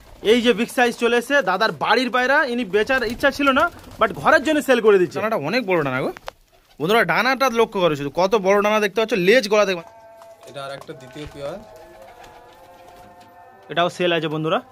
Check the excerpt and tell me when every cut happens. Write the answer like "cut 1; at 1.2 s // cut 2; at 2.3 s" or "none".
cut 1; at 5.2 s // cut 2; at 9.8 s